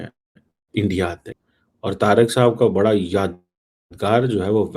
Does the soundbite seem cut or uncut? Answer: cut